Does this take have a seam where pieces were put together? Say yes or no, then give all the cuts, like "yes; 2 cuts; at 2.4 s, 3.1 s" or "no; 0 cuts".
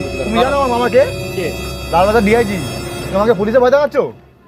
no; 0 cuts